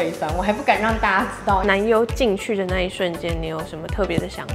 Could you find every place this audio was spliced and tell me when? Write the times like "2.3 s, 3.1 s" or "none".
1.6 s